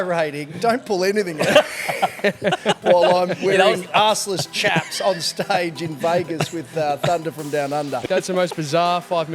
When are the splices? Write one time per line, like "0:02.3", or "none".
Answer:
0:08.0